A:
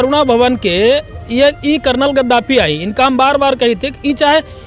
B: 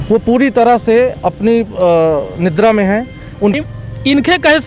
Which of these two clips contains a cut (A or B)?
B